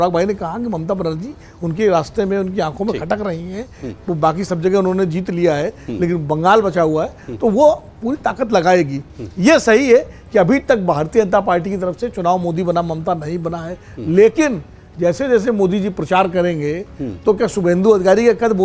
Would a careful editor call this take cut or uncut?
uncut